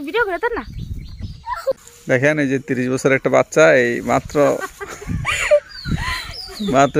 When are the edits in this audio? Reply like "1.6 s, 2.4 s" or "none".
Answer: 1.9 s